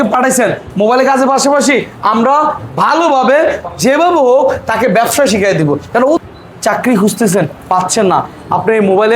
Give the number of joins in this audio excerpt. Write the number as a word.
one